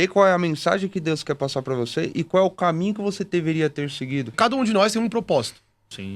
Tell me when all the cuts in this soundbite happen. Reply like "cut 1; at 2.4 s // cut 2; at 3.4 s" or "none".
cut 1; at 4.3 s